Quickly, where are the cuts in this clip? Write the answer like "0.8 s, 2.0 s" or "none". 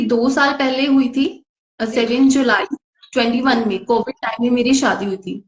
none